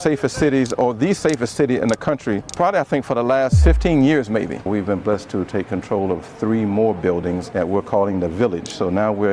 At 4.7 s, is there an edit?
yes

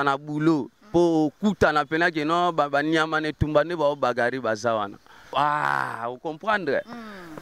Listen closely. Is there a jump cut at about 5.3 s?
yes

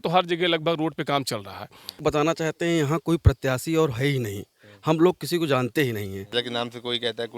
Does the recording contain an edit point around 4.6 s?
no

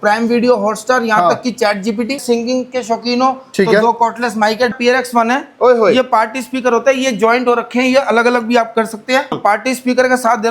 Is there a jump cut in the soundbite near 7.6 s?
no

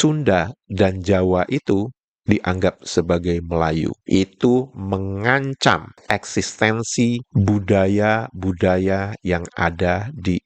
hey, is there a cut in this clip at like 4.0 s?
yes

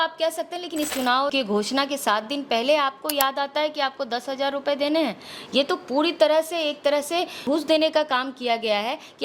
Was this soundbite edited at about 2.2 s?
no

